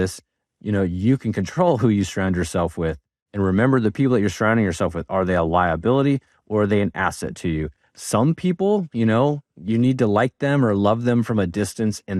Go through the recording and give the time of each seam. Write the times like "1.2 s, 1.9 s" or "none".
none